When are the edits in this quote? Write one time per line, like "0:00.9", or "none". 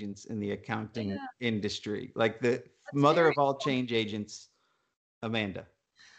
none